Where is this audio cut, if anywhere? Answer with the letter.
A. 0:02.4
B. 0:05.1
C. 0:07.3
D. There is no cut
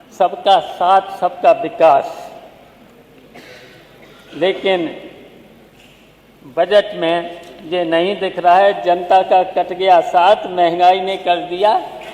D